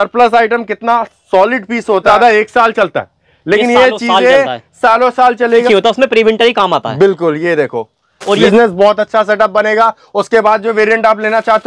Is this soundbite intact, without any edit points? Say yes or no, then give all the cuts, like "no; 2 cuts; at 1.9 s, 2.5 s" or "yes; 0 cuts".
no; 3 cuts; at 2.1 s, 5.7 s, 8.5 s